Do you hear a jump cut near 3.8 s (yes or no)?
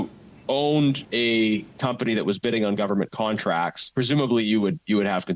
yes